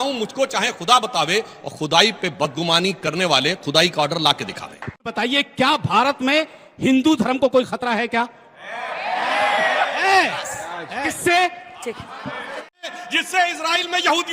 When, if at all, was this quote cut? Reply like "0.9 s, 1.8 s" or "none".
5.1 s, 12.8 s